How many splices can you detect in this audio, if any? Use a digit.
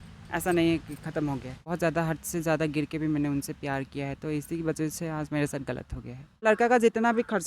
2